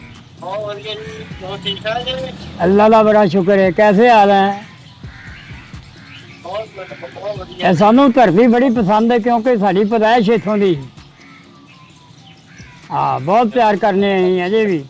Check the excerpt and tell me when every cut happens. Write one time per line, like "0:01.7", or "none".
none